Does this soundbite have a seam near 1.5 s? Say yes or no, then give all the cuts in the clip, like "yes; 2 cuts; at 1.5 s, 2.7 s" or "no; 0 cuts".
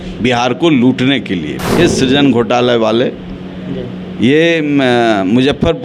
yes; 1 cut; at 1.5 s